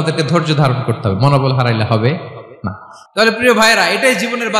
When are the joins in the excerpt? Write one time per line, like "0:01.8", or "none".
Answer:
0:02.5